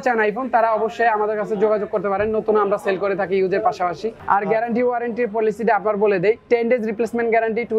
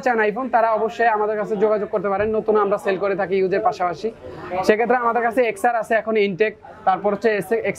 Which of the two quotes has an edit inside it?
first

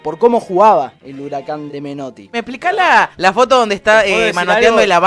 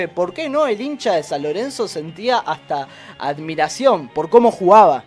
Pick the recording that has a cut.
first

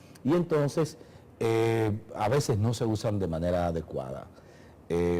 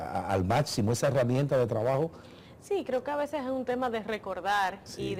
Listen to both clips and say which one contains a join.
first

